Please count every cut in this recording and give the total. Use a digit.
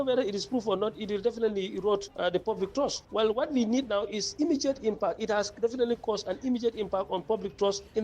1